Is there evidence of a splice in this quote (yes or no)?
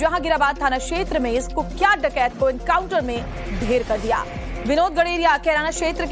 no